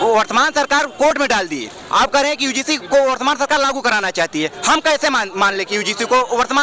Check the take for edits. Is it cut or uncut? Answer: uncut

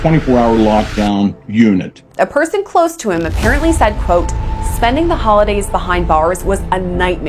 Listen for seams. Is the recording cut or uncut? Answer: cut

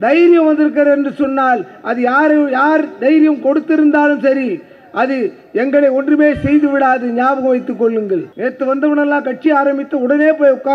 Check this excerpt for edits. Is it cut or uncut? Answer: cut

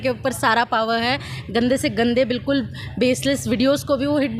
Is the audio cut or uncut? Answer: uncut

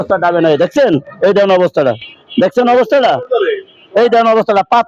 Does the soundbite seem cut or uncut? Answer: uncut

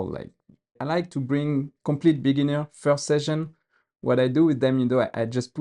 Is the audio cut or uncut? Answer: cut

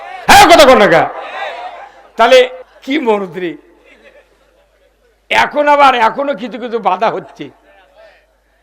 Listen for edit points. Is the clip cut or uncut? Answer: cut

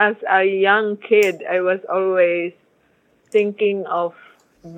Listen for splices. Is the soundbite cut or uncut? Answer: cut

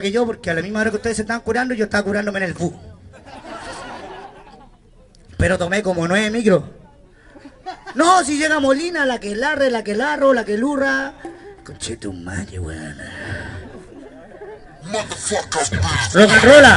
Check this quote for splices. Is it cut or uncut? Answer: uncut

